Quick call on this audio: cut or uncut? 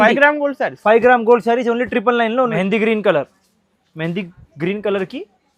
cut